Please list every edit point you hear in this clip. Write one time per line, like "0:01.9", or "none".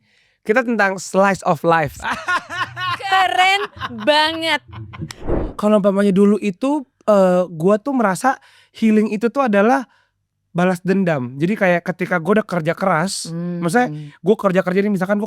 0:05.5